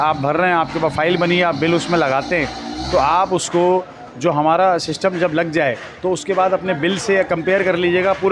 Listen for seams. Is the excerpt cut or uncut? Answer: uncut